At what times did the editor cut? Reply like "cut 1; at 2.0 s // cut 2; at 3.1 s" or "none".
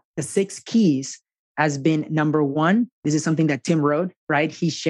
cut 1; at 2.5 s